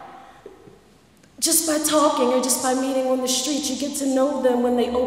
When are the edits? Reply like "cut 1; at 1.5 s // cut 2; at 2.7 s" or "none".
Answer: cut 1; at 3.1 s